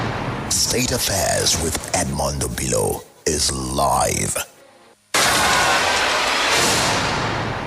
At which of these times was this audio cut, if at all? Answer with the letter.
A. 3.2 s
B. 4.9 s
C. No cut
B